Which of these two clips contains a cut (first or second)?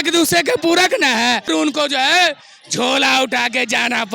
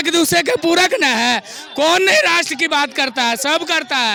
first